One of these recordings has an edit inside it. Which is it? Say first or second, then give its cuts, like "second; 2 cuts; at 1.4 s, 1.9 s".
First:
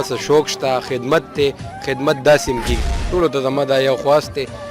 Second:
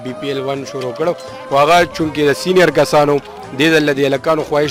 first; 1 cut; at 2.7 s